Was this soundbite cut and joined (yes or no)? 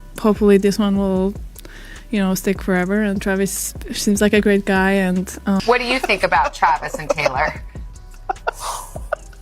yes